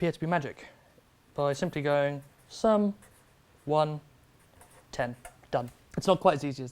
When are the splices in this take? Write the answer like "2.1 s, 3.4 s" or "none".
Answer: 5.8 s